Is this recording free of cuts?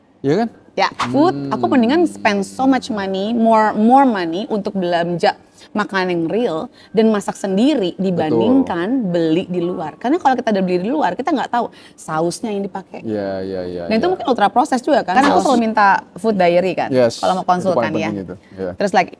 no; 2 cuts; at 1.0 s, 15.1 s

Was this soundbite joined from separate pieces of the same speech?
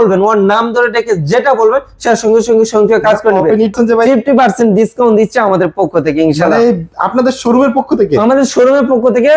yes; 1 cut; at 3.7 s

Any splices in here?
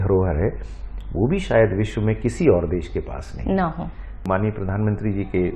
yes; 1 cut; at 4.2 s

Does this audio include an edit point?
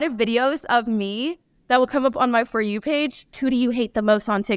yes; 1 cut; at 3.3 s

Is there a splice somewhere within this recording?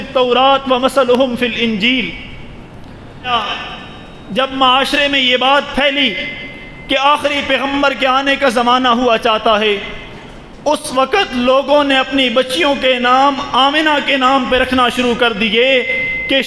yes; 1 cut; at 3.3 s

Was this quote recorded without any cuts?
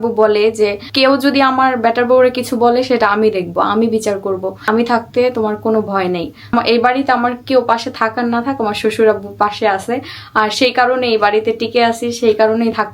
no; 3 cuts; at 0.9 s, 4.5 s, 6.5 s

